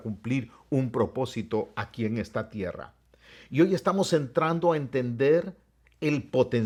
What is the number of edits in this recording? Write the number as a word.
zero